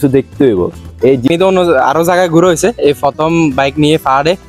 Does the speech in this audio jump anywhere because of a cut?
yes; 1 cut; at 1.3 s

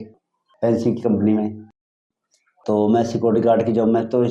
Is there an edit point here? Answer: no; 0 cuts

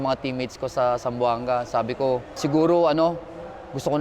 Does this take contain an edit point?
yes; 1 cut; at 2.4 s

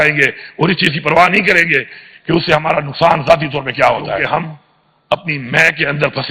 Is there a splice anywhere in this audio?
yes; 1 cut; at 4.2 s

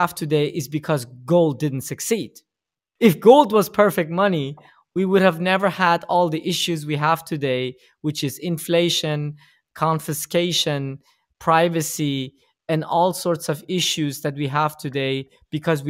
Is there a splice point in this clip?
no; 0 cuts

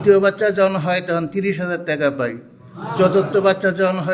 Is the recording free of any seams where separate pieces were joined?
yes; 0 cuts

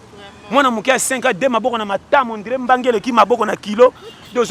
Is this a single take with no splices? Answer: yes; 0 cuts

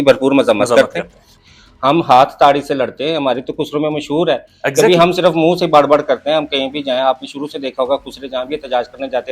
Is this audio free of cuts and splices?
no; 1 cut; at 1.2 s

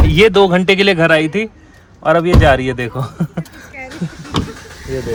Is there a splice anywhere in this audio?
no; 0 cuts

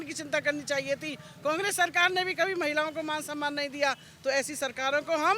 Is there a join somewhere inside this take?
no; 0 cuts

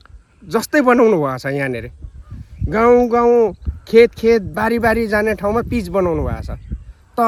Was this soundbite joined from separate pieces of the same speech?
no; 0 cuts

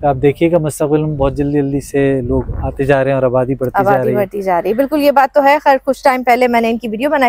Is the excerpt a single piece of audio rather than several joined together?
yes; 0 cuts

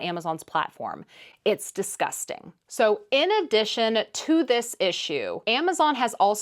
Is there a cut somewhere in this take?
no; 0 cuts

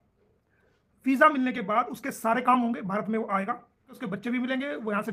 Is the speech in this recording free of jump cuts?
no; 1 cut; at 4.0 s

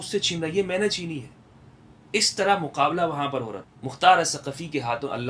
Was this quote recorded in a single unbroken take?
no; 1 cut; at 3.6 s

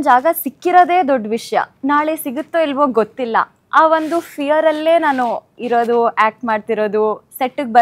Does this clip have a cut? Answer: no; 0 cuts

